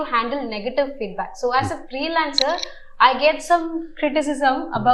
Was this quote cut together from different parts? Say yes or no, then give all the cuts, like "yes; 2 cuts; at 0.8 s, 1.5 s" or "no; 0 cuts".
no; 0 cuts